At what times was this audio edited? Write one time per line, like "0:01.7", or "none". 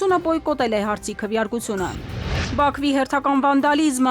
0:02.4